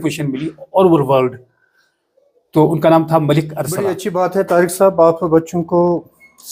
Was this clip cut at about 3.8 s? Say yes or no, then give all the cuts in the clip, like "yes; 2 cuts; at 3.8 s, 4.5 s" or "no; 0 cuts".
yes; 1 cut; at 3.8 s